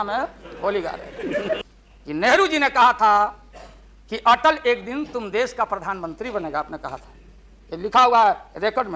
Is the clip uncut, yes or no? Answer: no